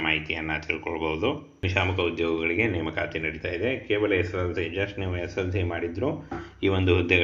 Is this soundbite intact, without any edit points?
no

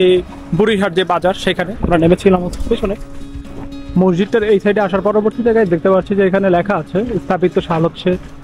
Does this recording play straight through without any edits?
no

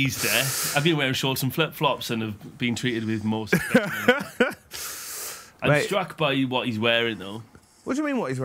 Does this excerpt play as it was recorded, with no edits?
yes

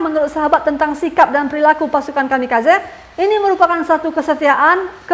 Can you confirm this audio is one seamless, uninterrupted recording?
yes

